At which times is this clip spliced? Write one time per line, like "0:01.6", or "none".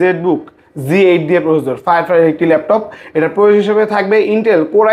none